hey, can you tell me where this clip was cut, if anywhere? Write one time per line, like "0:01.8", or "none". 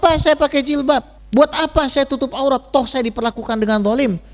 0:01.2